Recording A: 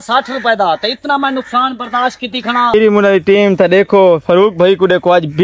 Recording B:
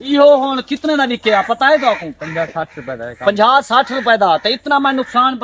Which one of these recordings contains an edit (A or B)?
A